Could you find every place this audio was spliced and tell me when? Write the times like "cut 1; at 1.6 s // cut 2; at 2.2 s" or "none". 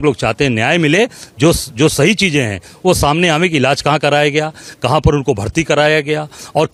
none

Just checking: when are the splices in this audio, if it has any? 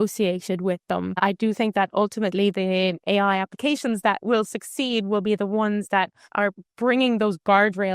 cut 1; at 1.1 s // cut 2; at 6.3 s

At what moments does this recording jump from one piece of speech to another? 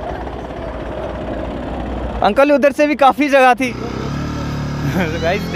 cut 1; at 3.6 s

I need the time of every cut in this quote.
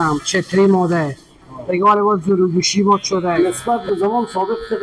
cut 1; at 3.4 s

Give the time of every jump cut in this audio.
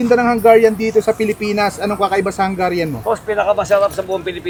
none

